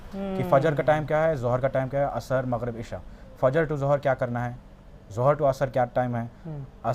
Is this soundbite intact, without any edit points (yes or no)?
yes